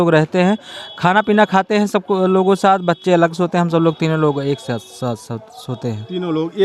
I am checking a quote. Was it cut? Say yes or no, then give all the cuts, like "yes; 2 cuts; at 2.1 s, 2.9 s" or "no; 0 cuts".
no; 0 cuts